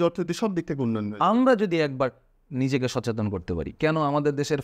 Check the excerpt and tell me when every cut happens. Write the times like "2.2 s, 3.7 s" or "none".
3.7 s

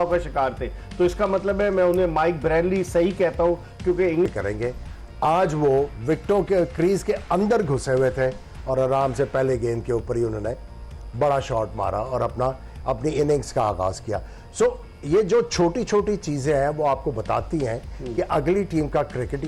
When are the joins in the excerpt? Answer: 4.3 s

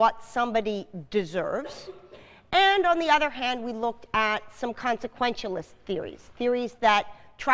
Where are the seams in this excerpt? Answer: 1.1 s

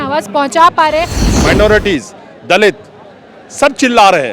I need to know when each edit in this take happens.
1.2 s

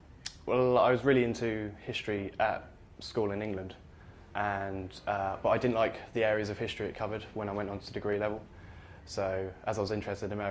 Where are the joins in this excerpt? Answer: 7.9 s

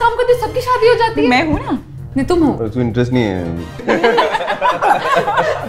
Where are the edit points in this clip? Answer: 2.6 s, 3.8 s

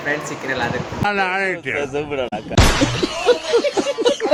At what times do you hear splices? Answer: none

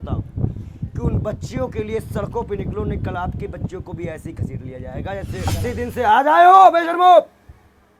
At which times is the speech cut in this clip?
5.5 s

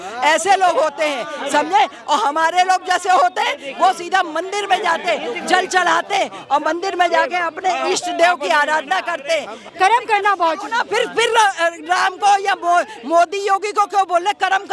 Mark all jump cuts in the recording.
9.6 s

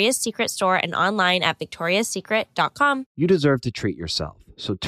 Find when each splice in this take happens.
3.1 s

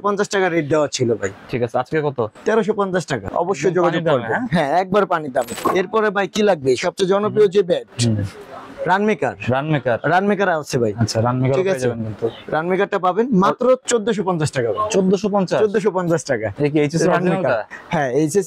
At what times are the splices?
3.3 s, 5.6 s

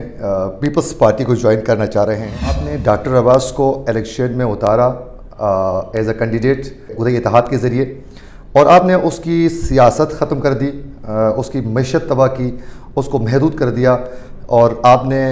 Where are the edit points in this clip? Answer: 2.6 s, 6.9 s

